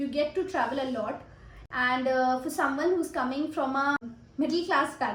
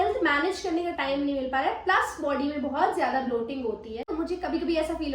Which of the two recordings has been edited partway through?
second; 1 cut; at 4.1 s

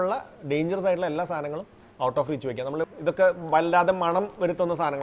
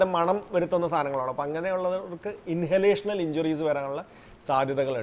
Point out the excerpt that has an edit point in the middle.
first; 1 cut; at 2.8 s

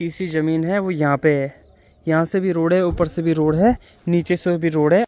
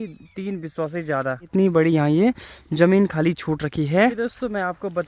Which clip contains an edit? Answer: second; 2 cuts; at 1.5 s, 4.1 s

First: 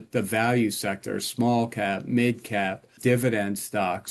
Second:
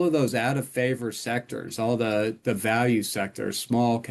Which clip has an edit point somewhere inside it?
first; 1 cut; at 3.0 s

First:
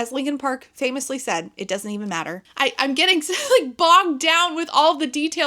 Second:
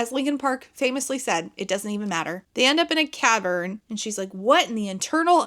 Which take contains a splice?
first; 1 cut; at 2.5 s

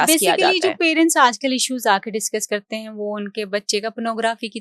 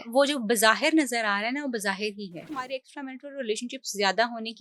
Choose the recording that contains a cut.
second; 1 cut; at 2.5 s

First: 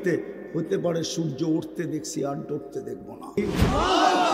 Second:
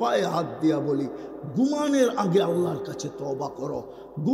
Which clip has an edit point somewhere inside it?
first; 1 cut; at 3.4 s

